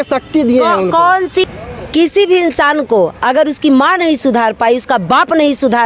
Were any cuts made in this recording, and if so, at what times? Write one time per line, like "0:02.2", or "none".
0:01.5